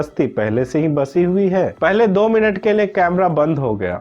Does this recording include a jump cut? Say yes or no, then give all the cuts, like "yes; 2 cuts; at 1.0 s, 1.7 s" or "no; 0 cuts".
yes; 1 cut; at 1.7 s